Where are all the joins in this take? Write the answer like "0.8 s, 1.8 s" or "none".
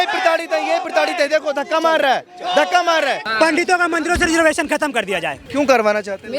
3.2 s, 5.4 s